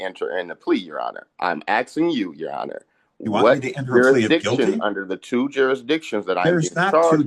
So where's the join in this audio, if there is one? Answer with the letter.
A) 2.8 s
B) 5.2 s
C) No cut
C